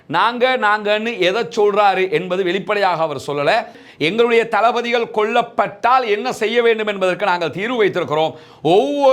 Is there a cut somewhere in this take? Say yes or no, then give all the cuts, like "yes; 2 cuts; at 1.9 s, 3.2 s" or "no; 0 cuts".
yes; 1 cut; at 3.8 s